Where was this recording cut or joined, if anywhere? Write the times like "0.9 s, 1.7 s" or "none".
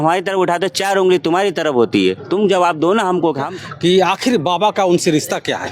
3.5 s